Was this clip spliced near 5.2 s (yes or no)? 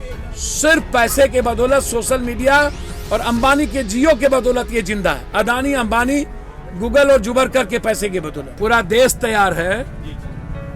no